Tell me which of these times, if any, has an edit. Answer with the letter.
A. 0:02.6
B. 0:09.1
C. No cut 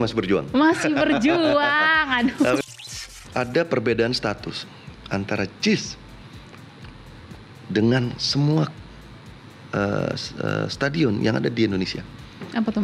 A